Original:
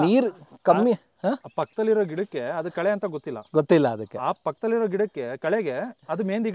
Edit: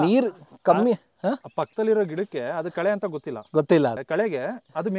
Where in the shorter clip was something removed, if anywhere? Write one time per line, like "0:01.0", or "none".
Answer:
0:04.0